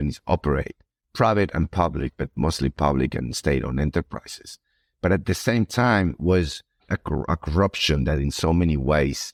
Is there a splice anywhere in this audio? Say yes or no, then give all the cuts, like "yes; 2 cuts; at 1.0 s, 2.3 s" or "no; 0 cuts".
no; 0 cuts